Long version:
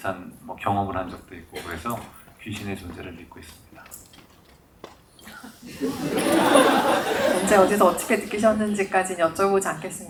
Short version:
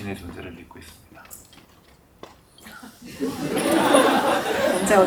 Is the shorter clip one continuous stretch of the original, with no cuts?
yes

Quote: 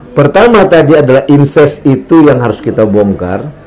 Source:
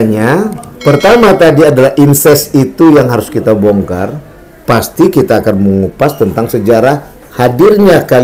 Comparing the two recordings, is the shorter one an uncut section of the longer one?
yes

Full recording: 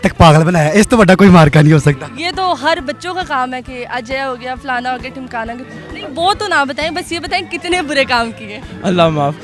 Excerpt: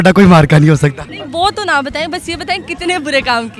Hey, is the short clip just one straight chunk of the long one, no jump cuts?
no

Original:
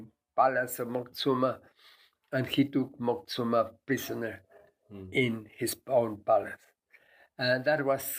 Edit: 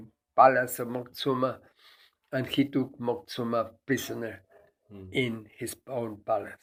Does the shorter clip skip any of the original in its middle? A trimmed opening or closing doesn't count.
no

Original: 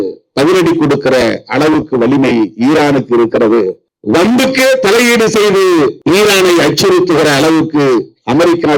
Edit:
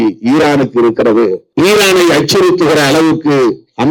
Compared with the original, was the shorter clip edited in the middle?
yes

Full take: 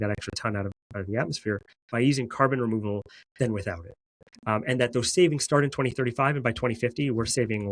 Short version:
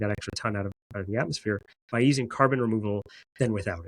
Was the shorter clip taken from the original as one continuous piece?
yes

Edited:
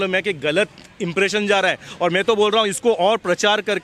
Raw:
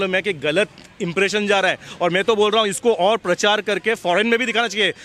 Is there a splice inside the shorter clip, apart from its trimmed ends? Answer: no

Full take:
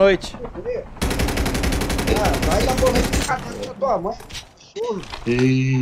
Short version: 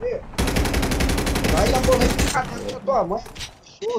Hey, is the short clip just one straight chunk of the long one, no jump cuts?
no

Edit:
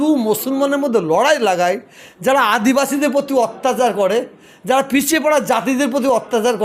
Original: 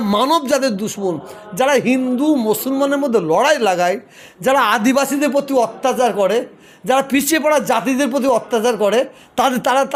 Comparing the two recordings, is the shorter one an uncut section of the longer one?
yes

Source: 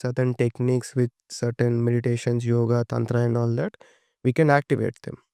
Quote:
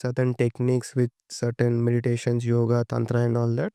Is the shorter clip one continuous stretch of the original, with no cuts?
yes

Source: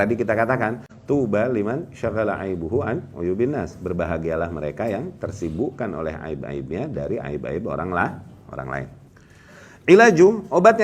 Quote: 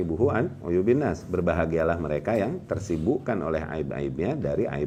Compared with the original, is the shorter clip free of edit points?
yes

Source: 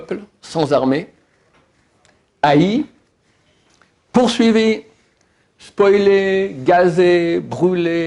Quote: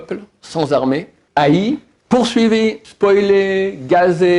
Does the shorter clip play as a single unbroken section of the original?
no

